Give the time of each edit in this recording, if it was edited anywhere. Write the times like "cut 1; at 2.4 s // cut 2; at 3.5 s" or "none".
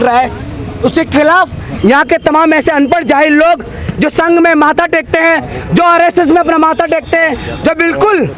cut 1; at 1.6 s